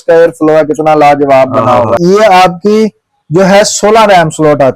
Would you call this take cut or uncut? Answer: cut